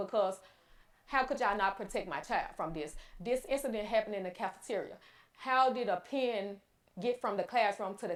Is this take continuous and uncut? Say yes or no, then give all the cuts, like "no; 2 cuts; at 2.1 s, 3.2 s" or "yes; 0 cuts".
yes; 0 cuts